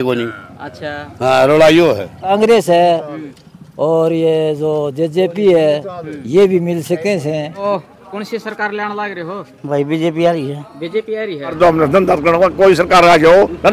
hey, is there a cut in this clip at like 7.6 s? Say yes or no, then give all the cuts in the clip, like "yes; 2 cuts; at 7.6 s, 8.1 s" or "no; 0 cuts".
yes; 3 cuts; at 2.3 s, 7.6 s, 11.5 s